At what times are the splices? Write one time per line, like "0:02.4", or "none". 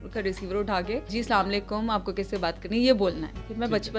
0:01.1